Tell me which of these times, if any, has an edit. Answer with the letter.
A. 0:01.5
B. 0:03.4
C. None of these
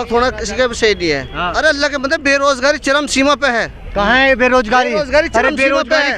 A